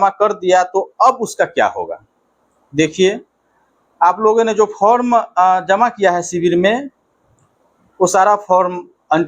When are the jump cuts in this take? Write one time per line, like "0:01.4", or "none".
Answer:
none